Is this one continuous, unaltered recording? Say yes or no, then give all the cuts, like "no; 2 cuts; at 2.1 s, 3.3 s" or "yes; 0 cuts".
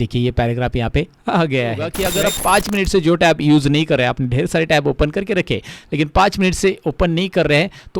no; 1 cut; at 2.0 s